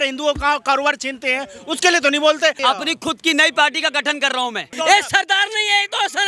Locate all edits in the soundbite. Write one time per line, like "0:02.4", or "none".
0:02.6
0:04.7